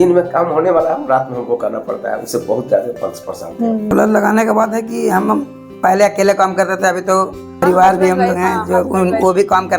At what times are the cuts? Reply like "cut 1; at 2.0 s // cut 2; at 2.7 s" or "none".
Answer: cut 1; at 3.9 s // cut 2; at 7.6 s